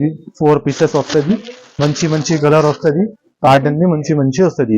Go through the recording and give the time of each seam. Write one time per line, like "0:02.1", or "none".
none